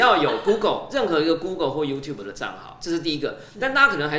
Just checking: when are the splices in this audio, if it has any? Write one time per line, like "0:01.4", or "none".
none